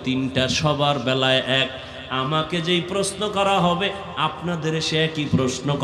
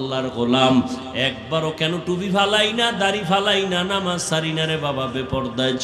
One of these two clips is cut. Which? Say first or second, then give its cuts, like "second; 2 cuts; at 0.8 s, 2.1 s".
second; 1 cut; at 1.0 s